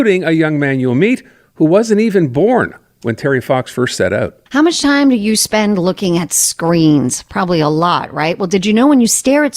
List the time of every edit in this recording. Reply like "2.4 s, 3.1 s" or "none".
4.4 s